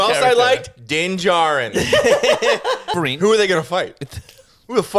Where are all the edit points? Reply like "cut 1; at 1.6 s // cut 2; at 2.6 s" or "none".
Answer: cut 1; at 2.9 s